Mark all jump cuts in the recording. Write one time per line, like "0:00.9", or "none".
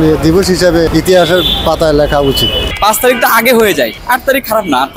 0:00.9
0:02.7
0:04.0

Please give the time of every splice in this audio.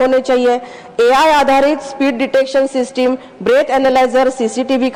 none

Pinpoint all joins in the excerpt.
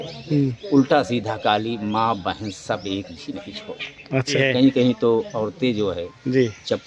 0:04.3

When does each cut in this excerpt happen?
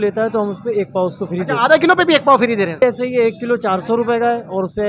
0:02.8

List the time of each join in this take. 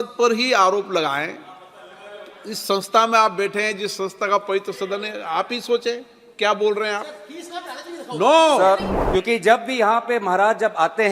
0:08.9

